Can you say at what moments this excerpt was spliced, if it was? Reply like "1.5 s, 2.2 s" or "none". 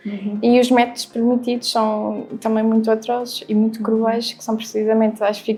none